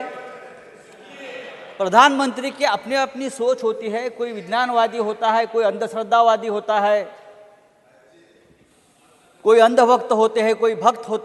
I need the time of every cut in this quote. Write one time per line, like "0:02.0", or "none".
none